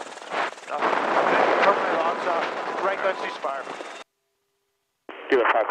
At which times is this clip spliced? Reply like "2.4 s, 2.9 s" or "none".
2.0 s